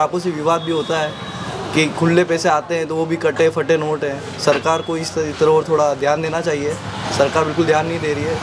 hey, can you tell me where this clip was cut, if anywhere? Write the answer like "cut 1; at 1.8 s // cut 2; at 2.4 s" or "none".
none